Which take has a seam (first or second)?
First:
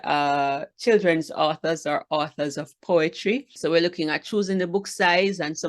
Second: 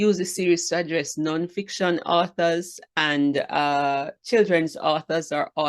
first